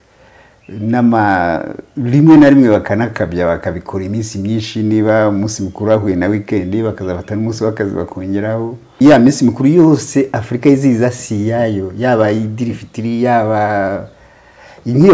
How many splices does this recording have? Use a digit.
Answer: 1